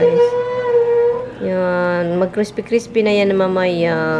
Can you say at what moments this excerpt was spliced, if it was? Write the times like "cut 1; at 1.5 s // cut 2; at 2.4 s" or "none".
none

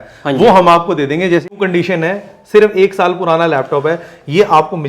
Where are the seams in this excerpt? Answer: cut 1; at 1.5 s

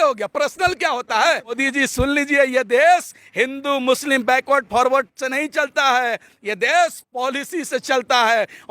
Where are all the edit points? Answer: cut 1; at 1.6 s

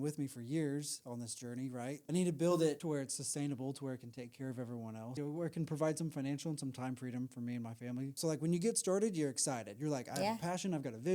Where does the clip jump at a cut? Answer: cut 1; at 2.0 s // cut 2; at 2.8 s // cut 3; at 5.1 s // cut 4; at 8.2 s

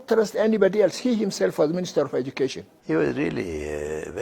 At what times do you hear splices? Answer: cut 1; at 2.7 s

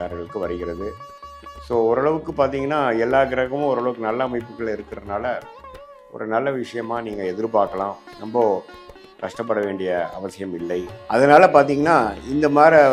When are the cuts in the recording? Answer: none

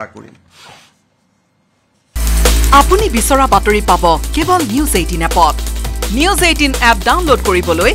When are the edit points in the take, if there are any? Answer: cut 1; at 2.2 s

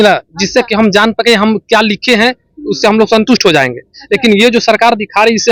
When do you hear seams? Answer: none

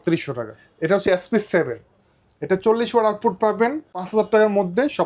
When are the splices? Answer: cut 1; at 0.9 s // cut 2; at 4.1 s

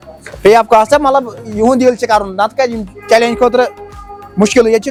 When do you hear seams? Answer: none

